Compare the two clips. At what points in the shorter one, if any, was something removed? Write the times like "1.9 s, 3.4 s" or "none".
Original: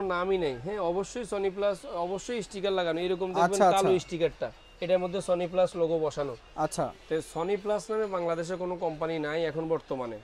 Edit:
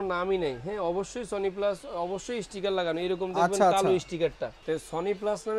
4.6 s